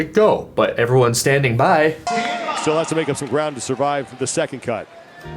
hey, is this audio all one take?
no; 1 cut; at 2.1 s

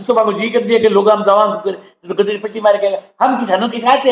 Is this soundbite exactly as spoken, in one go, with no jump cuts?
yes; 0 cuts

